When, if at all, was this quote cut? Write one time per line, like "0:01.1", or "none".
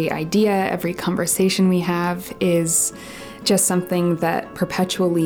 none

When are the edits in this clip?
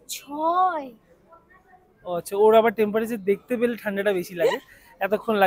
none

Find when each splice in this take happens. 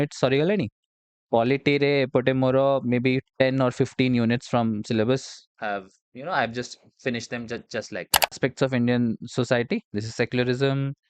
0:08.4

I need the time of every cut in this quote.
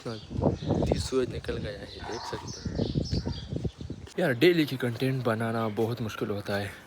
0:04.1

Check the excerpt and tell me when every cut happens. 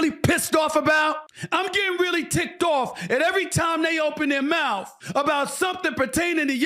0:01.3
0:05.0

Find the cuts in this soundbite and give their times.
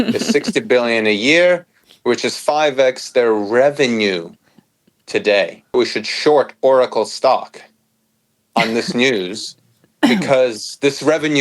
0:05.7

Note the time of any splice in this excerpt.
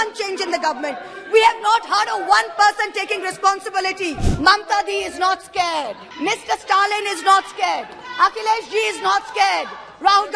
0:04.3
0:06.0

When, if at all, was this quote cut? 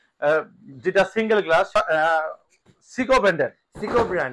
0:01.7

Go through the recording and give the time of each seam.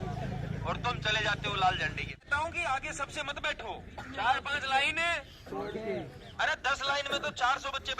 0:02.2

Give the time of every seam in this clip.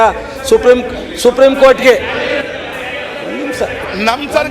none

